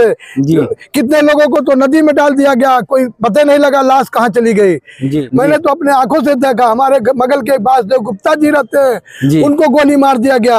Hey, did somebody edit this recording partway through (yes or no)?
yes